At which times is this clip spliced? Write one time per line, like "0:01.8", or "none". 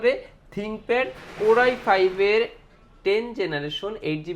none